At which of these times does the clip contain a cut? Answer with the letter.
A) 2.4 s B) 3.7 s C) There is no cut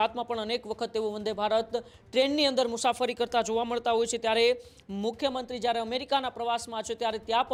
C